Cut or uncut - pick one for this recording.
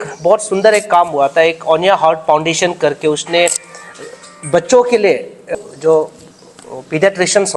cut